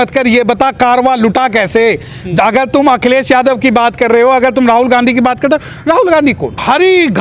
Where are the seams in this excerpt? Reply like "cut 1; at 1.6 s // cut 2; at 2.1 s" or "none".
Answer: none

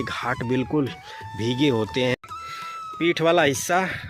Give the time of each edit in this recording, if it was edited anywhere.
cut 1; at 2.1 s

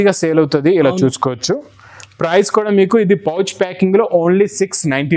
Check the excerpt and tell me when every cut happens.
none

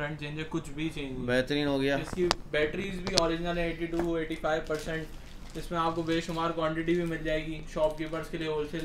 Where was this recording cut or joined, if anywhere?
none

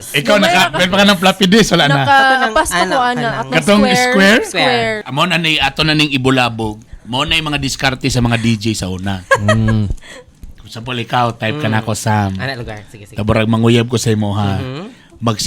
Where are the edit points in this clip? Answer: cut 1; at 5.0 s

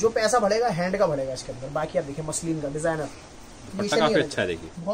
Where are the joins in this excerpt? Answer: none

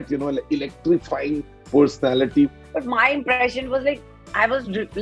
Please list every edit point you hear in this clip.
cut 1; at 2.5 s

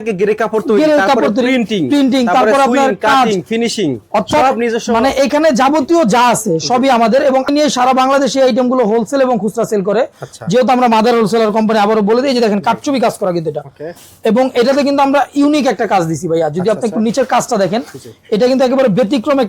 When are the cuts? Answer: cut 1; at 7.5 s

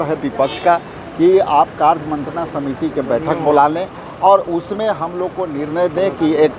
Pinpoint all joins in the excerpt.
none

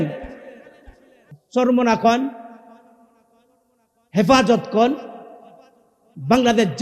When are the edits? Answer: cut 1; at 1.3 s

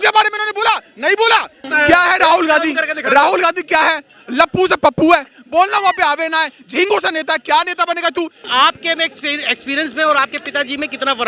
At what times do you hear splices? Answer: cut 1; at 1.6 s // cut 2; at 8.4 s

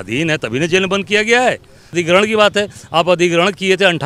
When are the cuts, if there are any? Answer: cut 1; at 1.9 s

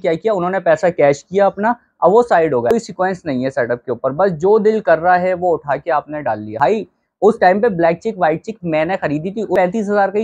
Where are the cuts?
cut 1; at 2.7 s // cut 2; at 6.6 s // cut 3; at 9.5 s

